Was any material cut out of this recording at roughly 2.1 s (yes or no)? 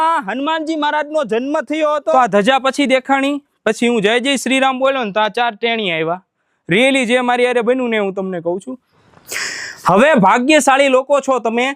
yes